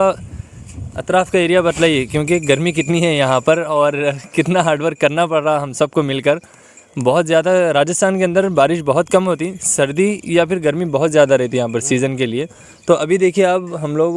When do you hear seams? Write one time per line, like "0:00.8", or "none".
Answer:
none